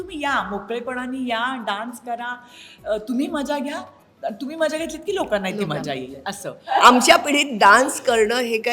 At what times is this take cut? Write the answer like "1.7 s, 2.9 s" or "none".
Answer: 6.7 s